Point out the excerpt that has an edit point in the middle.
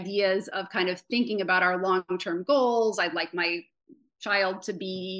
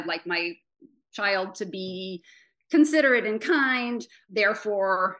second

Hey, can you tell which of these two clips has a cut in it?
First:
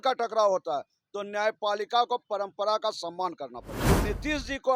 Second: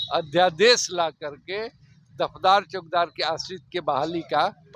first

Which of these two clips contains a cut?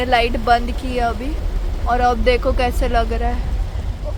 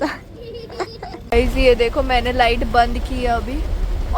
second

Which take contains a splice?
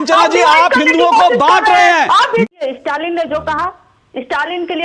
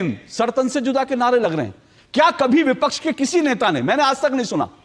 first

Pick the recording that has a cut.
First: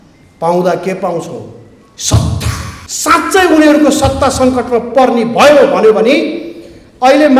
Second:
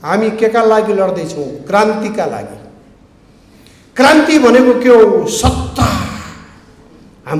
first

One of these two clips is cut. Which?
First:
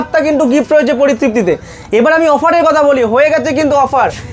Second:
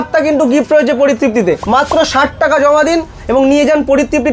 second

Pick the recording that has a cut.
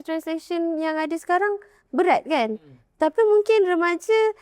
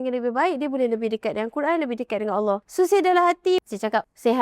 second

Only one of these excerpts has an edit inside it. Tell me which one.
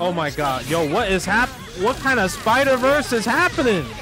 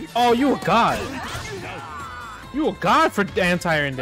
first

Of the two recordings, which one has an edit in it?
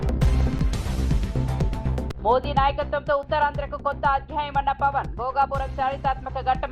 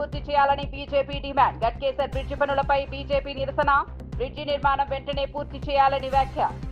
first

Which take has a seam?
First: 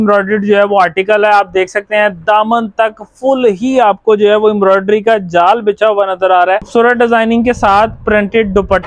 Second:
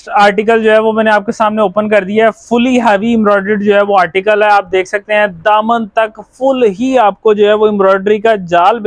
first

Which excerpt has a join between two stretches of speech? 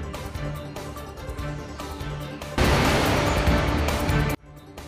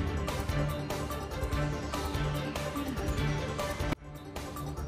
first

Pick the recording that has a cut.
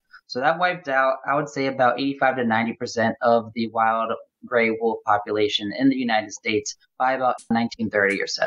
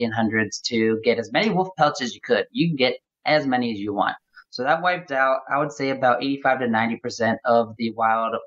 first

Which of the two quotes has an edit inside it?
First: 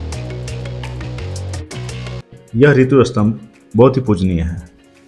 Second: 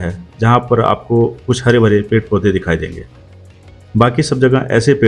first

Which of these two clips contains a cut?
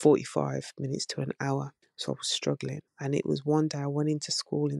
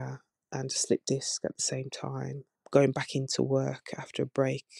first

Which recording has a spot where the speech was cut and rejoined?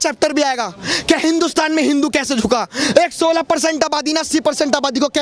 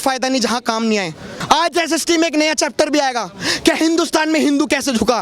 second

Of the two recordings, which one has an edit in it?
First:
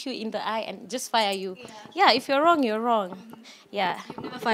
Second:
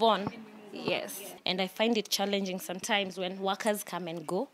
second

